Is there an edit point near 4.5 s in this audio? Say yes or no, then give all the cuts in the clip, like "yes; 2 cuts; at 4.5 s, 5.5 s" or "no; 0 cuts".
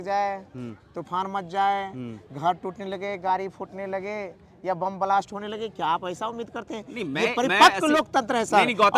no; 0 cuts